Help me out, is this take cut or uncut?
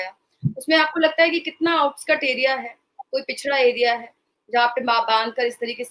uncut